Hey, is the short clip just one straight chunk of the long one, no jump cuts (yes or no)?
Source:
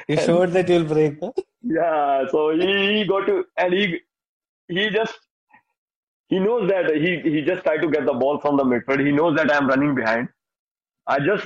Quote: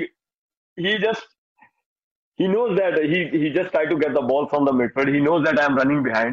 yes